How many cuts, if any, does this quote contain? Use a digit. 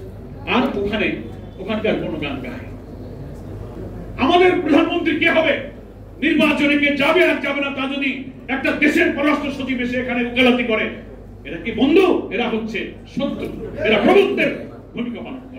1